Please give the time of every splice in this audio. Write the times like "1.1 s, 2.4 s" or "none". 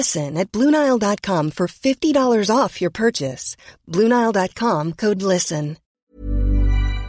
5.9 s